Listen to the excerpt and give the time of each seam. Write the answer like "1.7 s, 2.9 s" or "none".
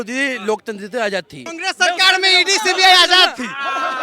1.6 s